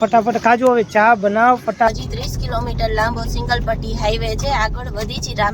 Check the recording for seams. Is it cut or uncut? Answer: cut